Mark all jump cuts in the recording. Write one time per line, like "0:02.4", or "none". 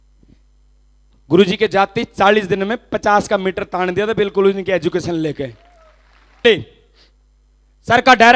0:06.4